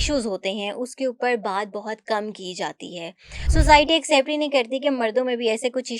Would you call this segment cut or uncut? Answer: cut